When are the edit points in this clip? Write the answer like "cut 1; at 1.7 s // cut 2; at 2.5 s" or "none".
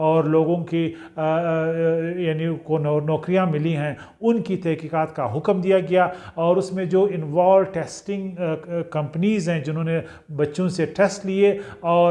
none